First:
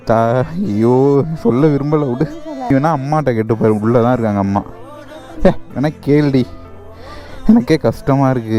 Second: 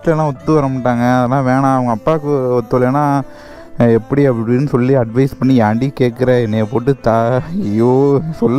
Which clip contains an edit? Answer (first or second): first